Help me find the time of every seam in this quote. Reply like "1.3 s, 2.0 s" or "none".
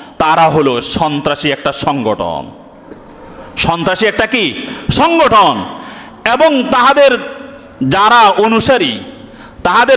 none